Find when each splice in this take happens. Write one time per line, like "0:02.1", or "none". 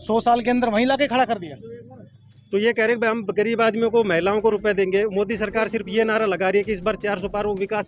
none